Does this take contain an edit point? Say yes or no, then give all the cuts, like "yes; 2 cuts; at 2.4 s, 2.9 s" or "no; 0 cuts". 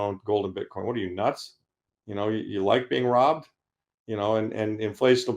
no; 0 cuts